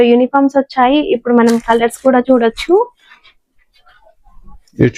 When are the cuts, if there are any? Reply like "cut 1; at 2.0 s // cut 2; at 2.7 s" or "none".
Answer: none

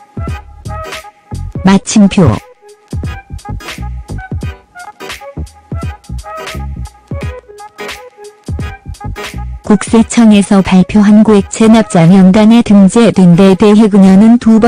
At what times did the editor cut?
none

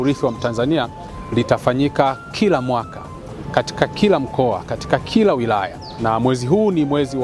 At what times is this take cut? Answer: cut 1; at 5.9 s

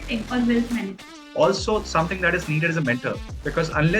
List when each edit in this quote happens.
cut 1; at 1.1 s

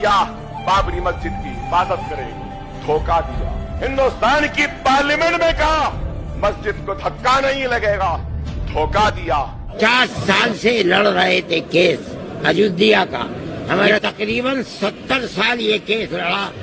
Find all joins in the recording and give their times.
cut 1; at 9.6 s

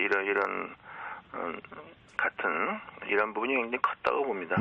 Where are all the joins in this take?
none

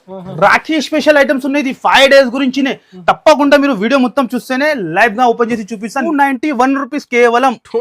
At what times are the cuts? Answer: cut 1; at 6.1 s

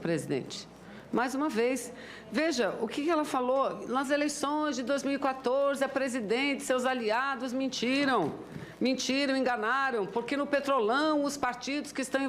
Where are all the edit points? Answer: cut 1; at 2.5 s

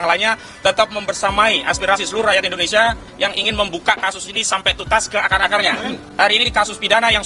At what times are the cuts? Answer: cut 1; at 6.0 s

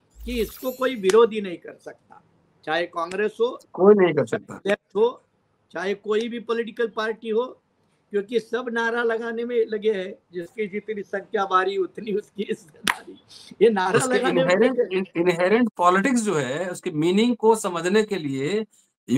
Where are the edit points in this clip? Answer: none

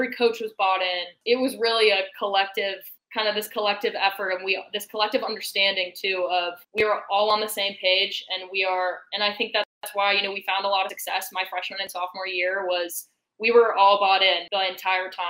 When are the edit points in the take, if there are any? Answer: none

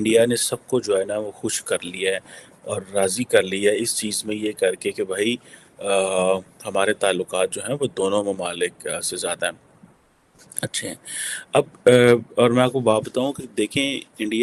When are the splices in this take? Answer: none

